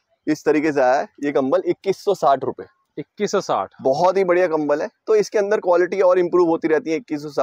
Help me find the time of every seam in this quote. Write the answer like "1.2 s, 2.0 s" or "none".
none